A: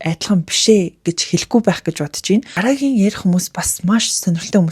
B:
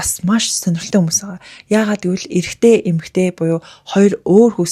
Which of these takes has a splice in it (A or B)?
A